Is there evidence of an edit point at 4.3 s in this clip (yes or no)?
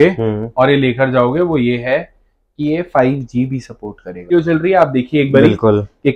yes